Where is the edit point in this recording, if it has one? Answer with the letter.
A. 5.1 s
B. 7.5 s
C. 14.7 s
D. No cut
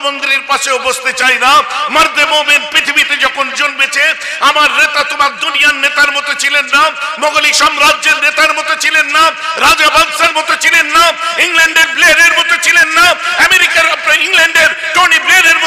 D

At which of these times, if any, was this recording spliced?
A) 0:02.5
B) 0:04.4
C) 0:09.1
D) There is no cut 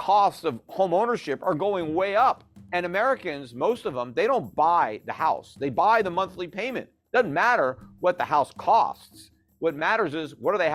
A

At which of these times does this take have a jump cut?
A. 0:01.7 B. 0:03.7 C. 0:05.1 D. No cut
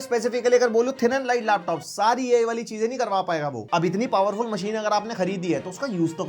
B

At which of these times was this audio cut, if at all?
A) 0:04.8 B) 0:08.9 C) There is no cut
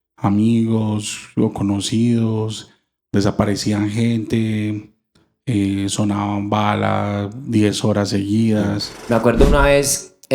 B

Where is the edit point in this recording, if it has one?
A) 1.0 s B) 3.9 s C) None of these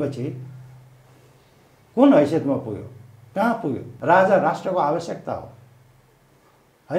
B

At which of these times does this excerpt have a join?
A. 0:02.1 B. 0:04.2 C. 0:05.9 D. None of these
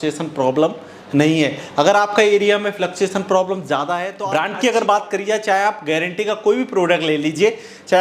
B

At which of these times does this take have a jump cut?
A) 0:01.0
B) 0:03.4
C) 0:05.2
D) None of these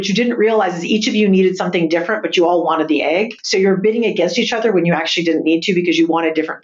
B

